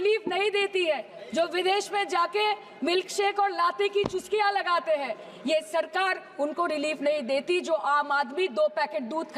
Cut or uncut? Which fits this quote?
uncut